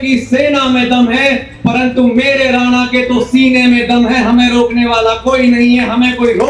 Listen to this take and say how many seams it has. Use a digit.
0